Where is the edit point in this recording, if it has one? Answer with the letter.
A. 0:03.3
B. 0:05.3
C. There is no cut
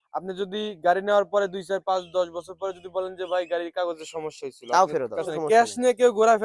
B